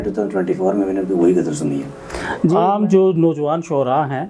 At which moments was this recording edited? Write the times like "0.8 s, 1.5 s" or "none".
2.5 s